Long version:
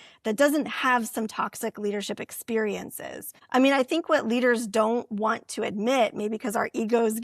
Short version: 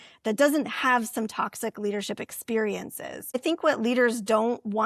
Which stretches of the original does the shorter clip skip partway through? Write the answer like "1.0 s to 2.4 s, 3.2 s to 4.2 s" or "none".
3.4 s to 3.9 s